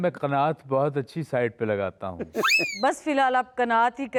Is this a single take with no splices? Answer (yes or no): yes